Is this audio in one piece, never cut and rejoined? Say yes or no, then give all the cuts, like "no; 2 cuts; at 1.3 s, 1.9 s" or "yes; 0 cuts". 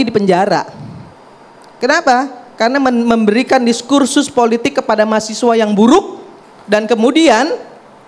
yes; 0 cuts